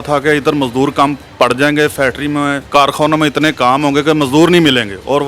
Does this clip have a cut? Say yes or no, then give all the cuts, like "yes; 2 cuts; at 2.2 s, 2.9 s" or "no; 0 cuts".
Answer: yes; 2 cuts; at 1.2 s, 2.6 s